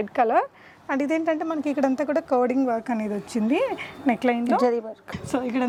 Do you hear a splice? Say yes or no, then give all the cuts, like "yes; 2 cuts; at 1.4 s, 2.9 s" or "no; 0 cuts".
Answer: no; 0 cuts